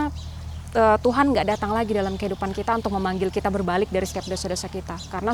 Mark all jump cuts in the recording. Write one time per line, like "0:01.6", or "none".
none

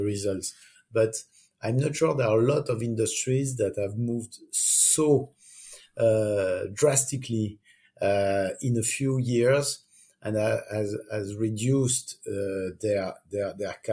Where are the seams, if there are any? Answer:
none

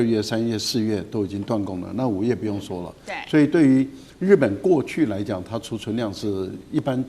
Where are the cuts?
none

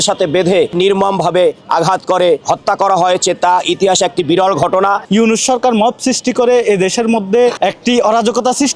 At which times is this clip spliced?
0:00.7
0:05.0

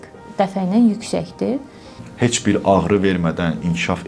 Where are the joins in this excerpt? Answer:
0:02.0

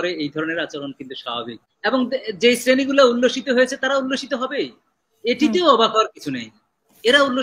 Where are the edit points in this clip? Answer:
0:01.6

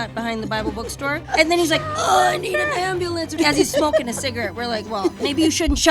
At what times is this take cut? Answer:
0:01.2
0:03.3

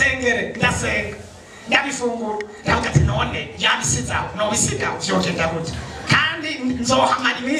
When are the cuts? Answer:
none

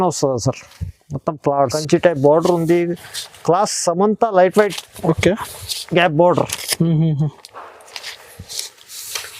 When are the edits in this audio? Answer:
0:01.8

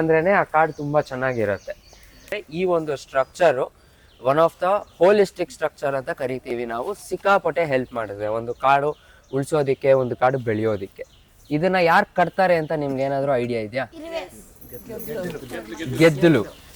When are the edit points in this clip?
0:02.3

